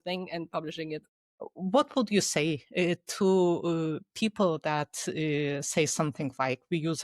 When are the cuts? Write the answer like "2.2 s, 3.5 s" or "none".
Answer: 1.0 s

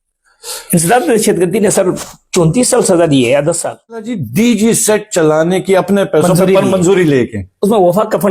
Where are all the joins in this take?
4.2 s

